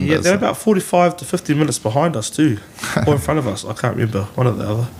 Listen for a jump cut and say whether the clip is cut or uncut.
uncut